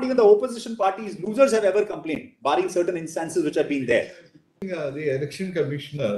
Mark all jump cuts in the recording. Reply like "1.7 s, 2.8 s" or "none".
4.6 s